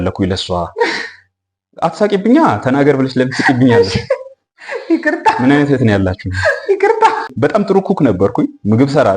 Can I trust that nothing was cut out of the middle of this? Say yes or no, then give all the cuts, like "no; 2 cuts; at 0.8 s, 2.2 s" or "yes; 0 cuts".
no; 1 cut; at 7.3 s